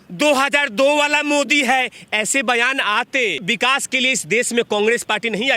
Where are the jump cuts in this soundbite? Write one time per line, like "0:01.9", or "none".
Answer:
0:03.4

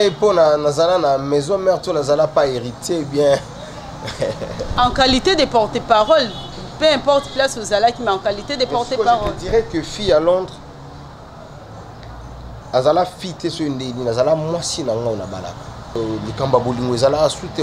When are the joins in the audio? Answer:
0:16.0

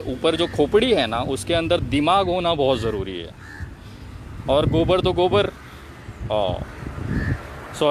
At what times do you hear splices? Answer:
none

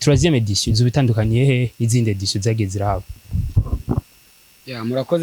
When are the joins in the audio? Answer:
none

